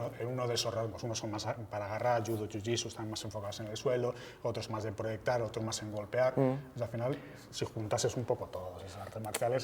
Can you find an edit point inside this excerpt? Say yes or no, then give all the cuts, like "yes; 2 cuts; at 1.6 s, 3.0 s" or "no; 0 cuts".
no; 0 cuts